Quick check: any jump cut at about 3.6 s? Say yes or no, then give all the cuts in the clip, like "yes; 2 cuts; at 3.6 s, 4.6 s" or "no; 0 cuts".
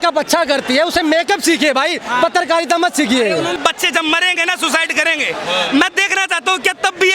yes; 1 cut; at 3.6 s